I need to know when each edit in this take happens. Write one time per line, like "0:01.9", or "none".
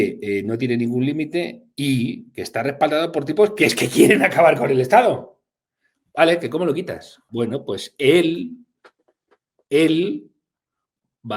0:07.2